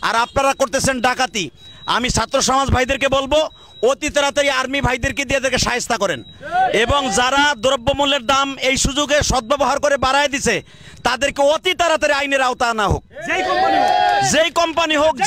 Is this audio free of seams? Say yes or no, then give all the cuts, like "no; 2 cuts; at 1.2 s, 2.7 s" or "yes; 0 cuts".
yes; 0 cuts